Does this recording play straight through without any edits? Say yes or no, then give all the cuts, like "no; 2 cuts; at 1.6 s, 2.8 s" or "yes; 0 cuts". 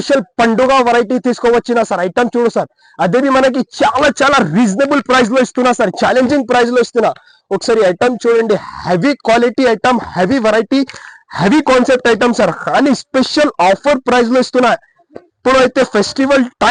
yes; 0 cuts